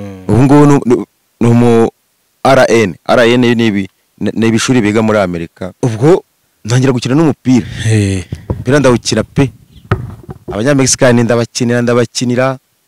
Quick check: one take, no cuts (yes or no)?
no